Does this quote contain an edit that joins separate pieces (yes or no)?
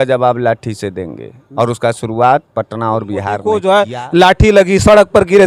yes